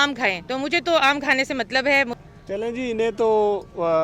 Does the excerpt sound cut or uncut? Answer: cut